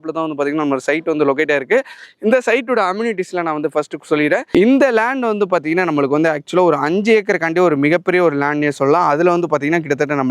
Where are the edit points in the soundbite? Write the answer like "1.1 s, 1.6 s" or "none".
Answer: none